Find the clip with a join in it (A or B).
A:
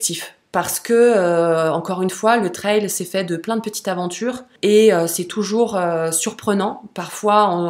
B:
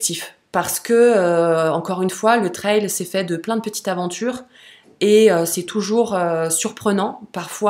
A